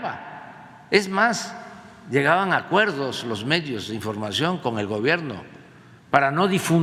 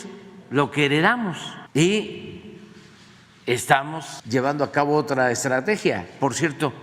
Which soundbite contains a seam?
second; 2 cuts; at 1.5 s, 4.1 s

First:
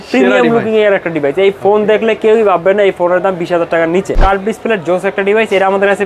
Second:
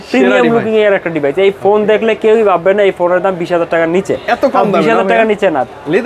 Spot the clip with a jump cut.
first; 1 cut; at 4.1 s

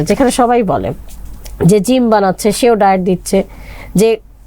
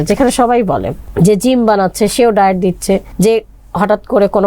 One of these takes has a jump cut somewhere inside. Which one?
second; 2 cuts; at 1.0 s, 3.1 s

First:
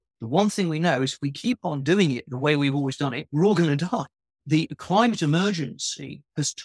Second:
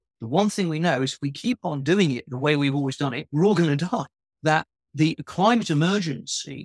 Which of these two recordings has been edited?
first; 1 cut; at 4.3 s

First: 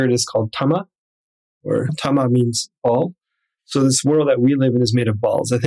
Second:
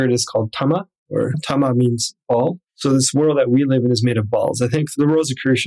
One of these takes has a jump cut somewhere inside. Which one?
second; 2 cuts; at 1.0 s, 2.7 s

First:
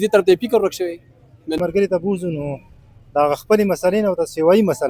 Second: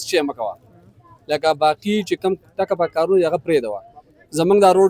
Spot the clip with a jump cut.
first; 1 cut; at 1.6 s

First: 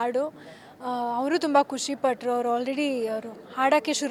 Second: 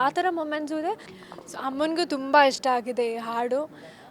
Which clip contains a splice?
second; 1 cut; at 1.2 s

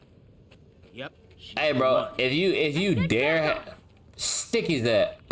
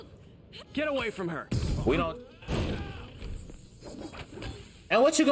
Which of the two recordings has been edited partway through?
second; 1 cut; at 2.0 s

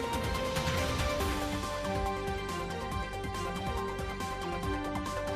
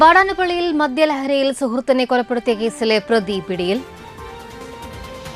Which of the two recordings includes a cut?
first; 1 cut; at 4.5 s

